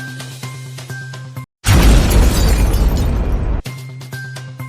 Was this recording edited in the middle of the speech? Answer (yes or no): yes